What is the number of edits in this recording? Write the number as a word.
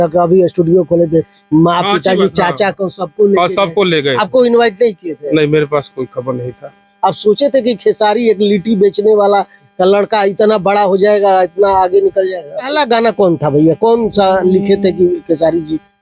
two